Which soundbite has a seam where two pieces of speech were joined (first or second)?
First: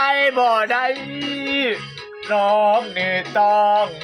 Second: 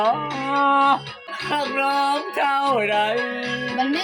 second